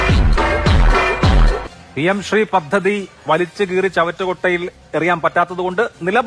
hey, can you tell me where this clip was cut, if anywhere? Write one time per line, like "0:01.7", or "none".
0:01.7